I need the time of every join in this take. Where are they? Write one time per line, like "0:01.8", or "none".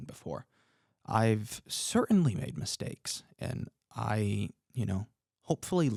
none